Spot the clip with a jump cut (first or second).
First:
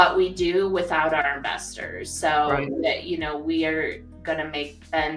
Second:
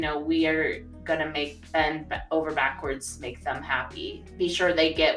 second